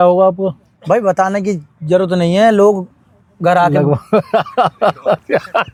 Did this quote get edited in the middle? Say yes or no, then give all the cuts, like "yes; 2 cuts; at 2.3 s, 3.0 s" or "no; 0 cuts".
no; 0 cuts